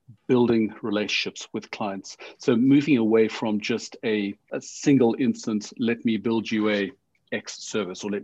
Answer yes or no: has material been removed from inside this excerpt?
yes